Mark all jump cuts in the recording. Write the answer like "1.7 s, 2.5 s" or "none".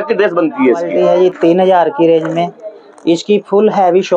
1.0 s